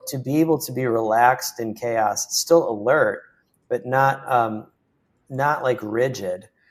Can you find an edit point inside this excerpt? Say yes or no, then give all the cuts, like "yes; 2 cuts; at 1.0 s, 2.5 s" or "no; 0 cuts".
no; 0 cuts